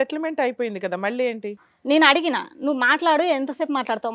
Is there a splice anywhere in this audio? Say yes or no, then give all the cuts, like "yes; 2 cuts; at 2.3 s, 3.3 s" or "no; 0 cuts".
yes; 1 cut; at 1.7 s